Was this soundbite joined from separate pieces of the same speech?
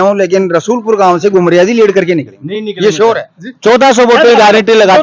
no; 0 cuts

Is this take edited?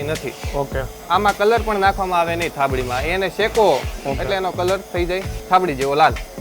yes; 3 cuts; at 0.9 s, 3.9 s, 5.3 s

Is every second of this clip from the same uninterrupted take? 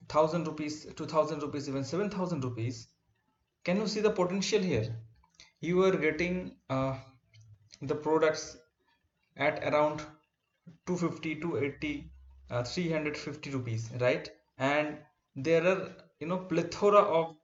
yes; 0 cuts

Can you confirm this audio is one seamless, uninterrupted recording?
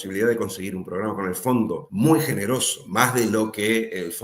no; 2 cuts; at 1.8 s, 2.8 s

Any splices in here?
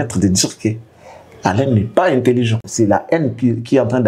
yes; 1 cut; at 2.7 s

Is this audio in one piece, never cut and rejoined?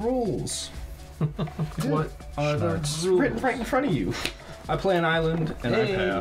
yes; 0 cuts

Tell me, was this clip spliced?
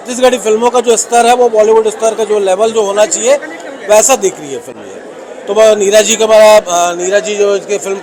no; 0 cuts

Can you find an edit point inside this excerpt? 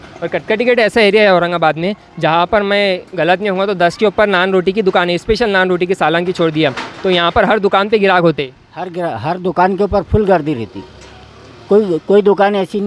no; 0 cuts

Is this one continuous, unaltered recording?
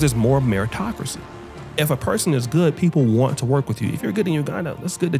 yes; 0 cuts

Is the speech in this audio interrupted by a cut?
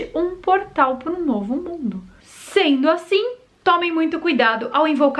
yes; 1 cut; at 2.1 s

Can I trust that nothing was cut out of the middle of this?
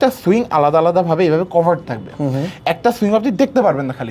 yes; 0 cuts

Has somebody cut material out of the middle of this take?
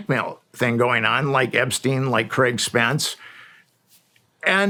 no; 0 cuts

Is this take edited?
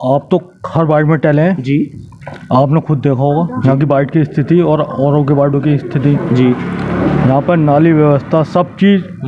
no; 0 cuts

